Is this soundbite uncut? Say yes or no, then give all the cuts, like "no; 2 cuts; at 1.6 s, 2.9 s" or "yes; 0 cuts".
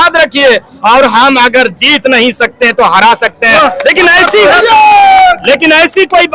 yes; 0 cuts